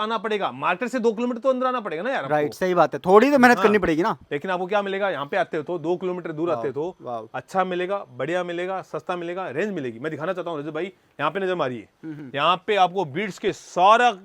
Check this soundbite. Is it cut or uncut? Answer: uncut